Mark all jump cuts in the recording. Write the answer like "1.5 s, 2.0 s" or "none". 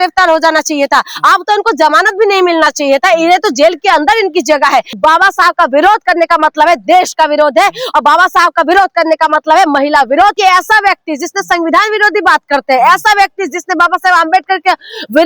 4.9 s, 10.4 s